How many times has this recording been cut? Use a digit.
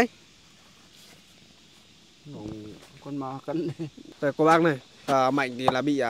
1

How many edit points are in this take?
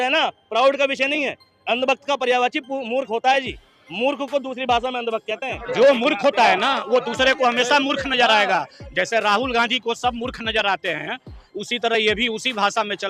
0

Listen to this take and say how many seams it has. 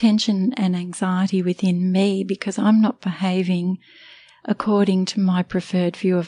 0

